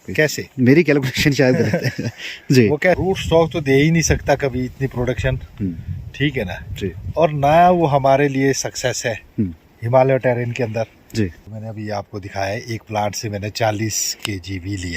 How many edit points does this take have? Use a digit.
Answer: 2